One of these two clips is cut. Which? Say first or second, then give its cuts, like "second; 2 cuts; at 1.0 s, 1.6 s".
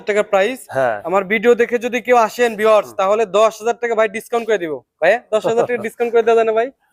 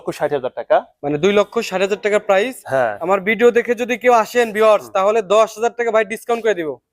second; 1 cut; at 0.9 s